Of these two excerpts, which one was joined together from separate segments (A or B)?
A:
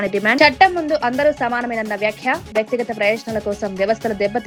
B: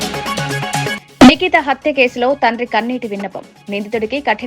B